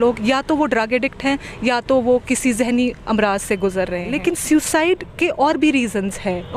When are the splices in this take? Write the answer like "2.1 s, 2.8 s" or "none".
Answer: 4.1 s